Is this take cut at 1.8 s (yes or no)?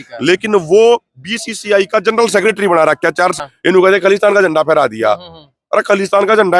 no